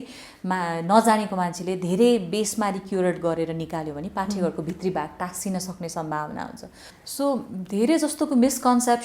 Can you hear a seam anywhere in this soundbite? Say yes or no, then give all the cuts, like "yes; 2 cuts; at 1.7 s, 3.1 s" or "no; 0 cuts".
yes; 1 cut; at 6.9 s